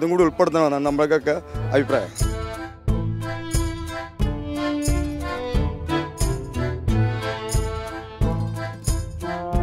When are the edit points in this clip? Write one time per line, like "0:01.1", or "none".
0:02.1